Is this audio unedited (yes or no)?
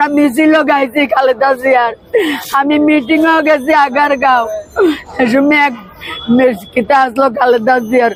yes